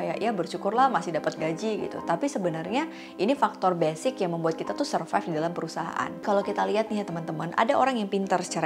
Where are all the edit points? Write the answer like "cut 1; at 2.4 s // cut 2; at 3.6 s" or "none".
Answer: cut 1; at 6.2 s